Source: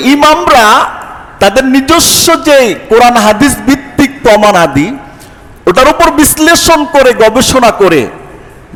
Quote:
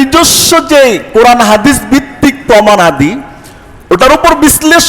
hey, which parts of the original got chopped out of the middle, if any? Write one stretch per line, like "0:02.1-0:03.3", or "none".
none